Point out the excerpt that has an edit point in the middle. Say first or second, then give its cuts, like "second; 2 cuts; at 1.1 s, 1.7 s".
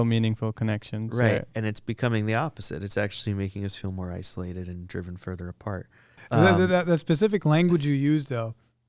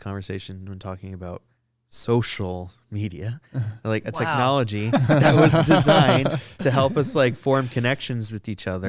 first; 1 cut; at 6.2 s